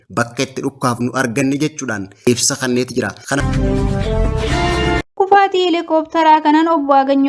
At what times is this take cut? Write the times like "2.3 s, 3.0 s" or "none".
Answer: 2.3 s, 3.4 s, 5.0 s

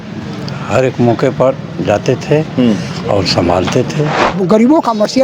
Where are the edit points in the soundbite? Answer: 4.2 s

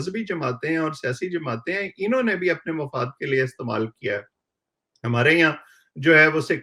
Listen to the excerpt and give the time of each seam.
none

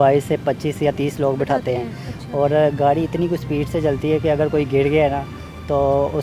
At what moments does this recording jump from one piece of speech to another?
none

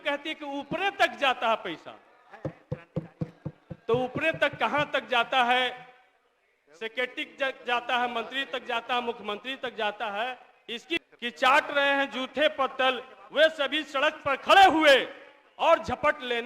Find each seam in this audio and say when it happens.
11.0 s

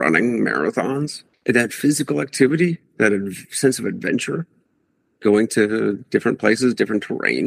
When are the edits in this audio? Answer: 1.2 s

